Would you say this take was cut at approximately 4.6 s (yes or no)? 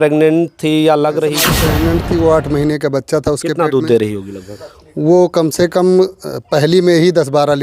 no